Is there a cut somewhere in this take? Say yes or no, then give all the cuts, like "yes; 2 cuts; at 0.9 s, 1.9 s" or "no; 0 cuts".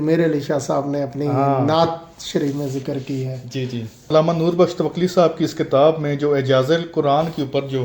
yes; 1 cut; at 4.1 s